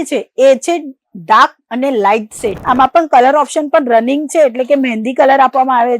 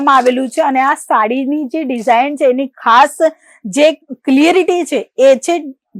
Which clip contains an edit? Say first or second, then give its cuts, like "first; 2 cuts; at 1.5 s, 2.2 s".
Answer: first; 1 cut; at 2.5 s